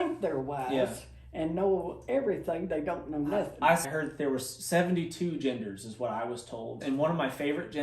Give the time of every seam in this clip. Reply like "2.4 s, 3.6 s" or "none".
3.8 s, 6.8 s

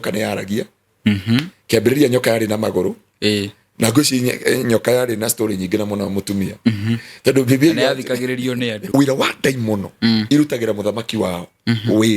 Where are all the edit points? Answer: 8.9 s

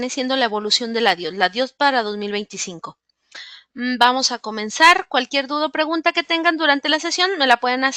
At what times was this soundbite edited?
none

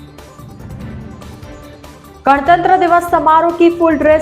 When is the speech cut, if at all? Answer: 1.4 s

